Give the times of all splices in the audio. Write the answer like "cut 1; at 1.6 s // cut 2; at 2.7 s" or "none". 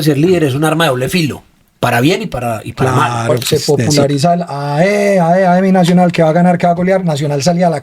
cut 1; at 3.4 s